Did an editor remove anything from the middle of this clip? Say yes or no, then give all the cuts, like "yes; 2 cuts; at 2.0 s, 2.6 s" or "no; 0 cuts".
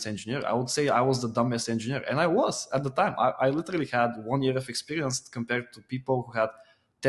no; 0 cuts